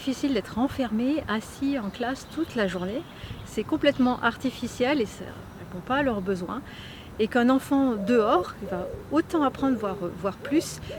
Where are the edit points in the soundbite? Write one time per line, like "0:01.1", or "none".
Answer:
none

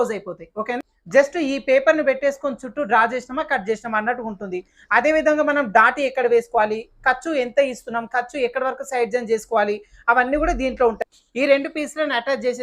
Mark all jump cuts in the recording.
0:00.9
0:11.0

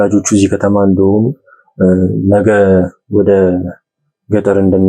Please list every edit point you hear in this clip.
none

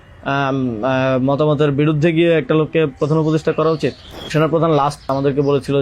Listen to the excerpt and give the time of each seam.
0:04.3
0:05.1

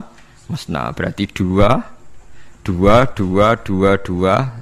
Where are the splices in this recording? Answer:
none

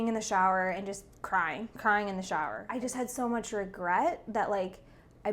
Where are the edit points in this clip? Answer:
0:02.6

